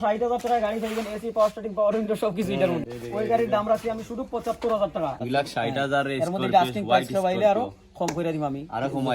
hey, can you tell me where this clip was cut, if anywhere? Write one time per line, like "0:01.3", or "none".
0:02.8
0:05.2